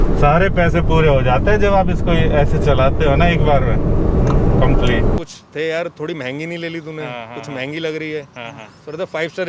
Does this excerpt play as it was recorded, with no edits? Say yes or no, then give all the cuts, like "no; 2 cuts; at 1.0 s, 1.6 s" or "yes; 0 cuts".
no; 1 cut; at 5.2 s